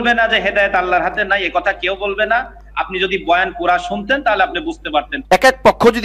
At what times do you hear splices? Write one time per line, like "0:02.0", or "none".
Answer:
0:05.1